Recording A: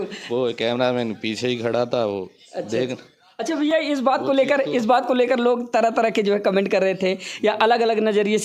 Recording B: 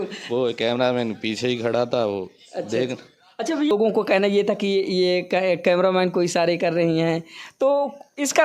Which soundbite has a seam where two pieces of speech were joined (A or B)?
B